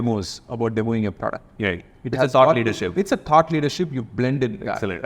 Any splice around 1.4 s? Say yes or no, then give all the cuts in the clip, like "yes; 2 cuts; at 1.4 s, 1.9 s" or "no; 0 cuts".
no; 0 cuts